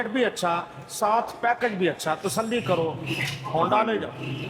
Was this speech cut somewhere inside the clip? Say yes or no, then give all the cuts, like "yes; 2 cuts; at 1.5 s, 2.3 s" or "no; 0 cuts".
no; 0 cuts